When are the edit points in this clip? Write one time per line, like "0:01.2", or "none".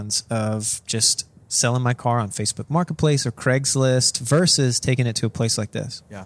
none

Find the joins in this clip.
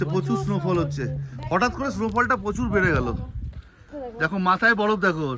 0:03.8

